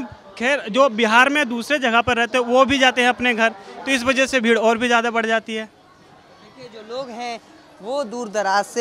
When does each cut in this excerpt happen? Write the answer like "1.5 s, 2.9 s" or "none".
none